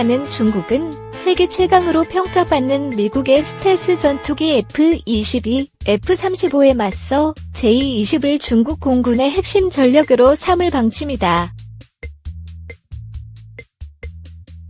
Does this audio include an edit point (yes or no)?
no